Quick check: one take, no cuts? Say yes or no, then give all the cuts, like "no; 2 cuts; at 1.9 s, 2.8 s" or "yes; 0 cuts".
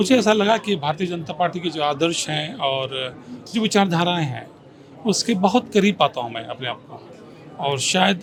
yes; 0 cuts